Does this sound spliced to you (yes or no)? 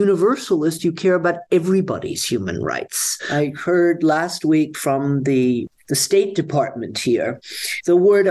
yes